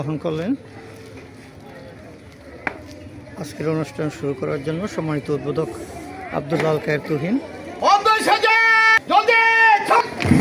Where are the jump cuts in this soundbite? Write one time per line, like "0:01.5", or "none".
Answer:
0:07.6
0:08.9